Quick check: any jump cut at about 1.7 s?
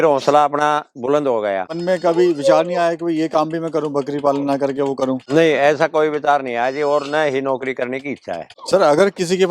yes; 3 cuts; at 1.7 s, 5.2 s, 8.5 s

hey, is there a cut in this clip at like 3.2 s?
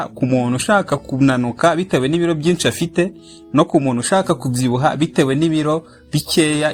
no; 0 cuts

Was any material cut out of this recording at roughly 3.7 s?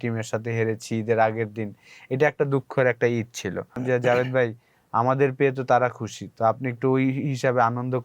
yes; 1 cut; at 3.7 s

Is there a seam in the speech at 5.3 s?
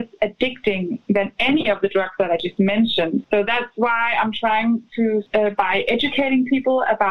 yes; 2 cuts; at 3.2 s, 5.3 s

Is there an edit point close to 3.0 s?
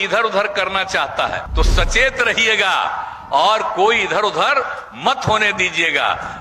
no; 1 cut; at 1.4 s

